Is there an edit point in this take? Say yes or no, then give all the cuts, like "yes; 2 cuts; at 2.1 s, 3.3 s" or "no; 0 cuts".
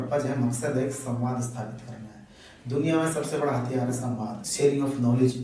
yes; 1 cut; at 4.4 s